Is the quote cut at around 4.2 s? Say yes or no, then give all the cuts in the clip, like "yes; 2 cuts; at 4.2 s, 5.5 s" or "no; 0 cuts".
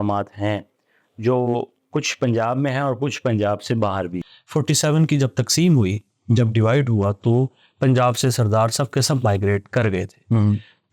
yes; 1 cut; at 4.2 s